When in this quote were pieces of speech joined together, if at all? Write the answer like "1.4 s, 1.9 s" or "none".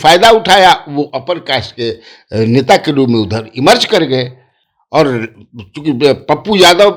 none